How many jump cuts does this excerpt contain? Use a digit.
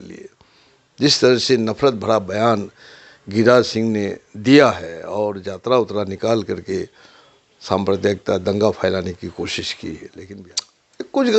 1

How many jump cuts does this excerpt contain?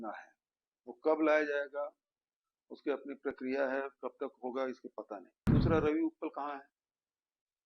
1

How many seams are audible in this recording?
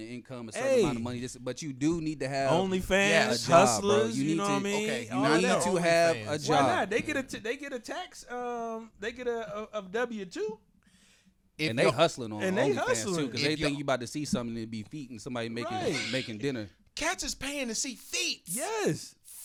0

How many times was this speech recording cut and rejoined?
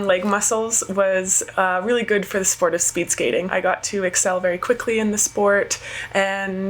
1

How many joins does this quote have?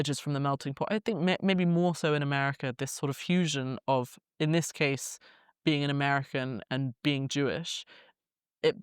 1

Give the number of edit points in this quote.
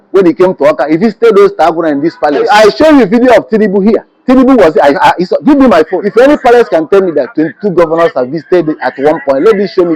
2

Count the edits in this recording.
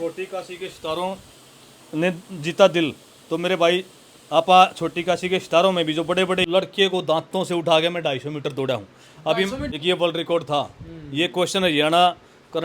2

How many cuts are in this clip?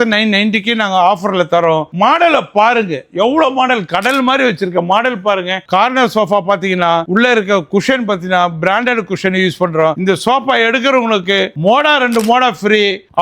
3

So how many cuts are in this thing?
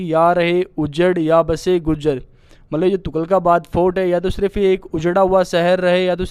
0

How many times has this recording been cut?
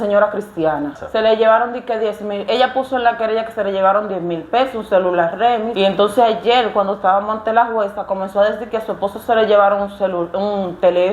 2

